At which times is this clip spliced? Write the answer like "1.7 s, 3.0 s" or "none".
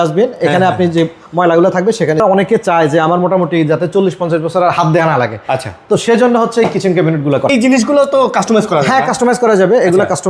2.2 s, 7.5 s